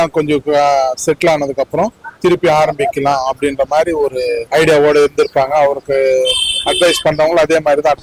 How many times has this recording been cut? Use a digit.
0